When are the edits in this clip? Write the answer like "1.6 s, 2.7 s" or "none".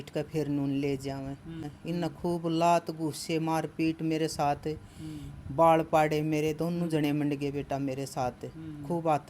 1.7 s

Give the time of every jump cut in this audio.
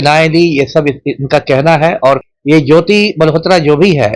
2.2 s

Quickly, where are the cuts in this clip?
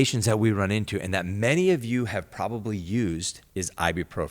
3.4 s

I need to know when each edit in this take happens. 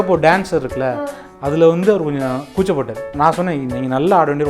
3.1 s

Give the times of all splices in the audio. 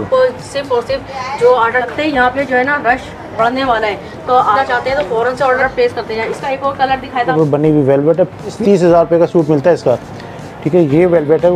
1.9 s, 4.6 s, 5.6 s, 7.3 s, 8.6 s

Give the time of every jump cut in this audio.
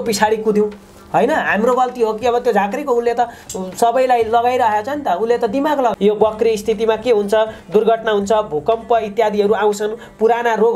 5.9 s

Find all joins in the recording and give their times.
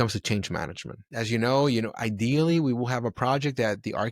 1.0 s

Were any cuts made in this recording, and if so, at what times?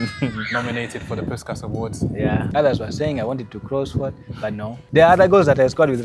2.5 s, 4.8 s

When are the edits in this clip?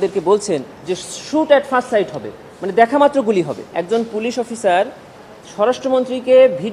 3.7 s

